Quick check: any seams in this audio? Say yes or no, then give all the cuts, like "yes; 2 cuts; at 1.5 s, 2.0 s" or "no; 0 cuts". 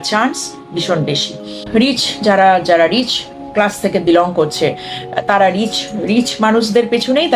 yes; 1 cut; at 1.6 s